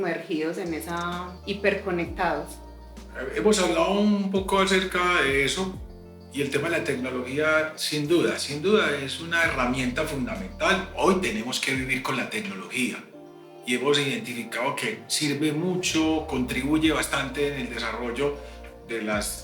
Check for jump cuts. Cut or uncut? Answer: uncut